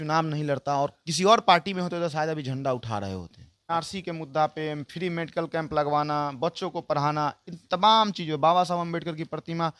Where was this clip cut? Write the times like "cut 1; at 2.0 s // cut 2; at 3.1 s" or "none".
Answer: cut 1; at 3.7 s